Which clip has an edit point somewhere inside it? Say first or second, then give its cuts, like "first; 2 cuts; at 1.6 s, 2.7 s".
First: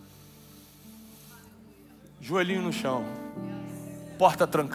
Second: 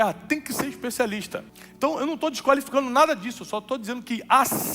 second; 1 cut; at 1.6 s